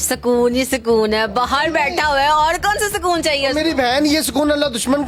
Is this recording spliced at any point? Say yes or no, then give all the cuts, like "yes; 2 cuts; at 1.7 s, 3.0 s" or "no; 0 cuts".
no; 0 cuts